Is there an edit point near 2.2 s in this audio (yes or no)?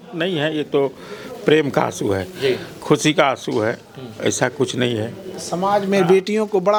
no